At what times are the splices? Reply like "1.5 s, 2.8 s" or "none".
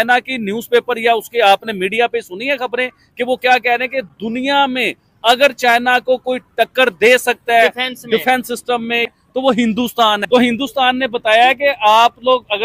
10.2 s

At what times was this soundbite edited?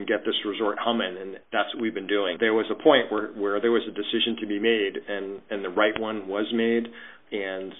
2.3 s

